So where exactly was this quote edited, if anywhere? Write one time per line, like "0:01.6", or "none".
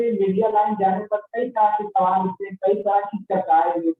none